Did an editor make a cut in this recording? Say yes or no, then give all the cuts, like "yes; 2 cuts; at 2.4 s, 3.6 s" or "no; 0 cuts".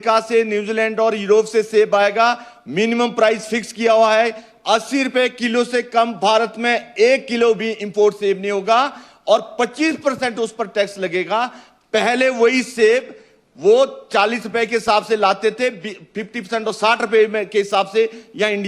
no; 0 cuts